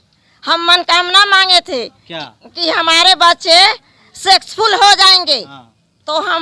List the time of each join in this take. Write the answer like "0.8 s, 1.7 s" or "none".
none